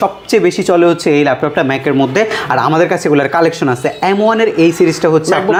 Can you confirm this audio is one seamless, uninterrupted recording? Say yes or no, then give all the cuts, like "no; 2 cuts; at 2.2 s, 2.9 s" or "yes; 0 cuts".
yes; 0 cuts